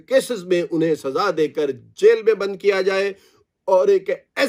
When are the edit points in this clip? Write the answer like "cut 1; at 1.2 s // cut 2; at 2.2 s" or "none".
none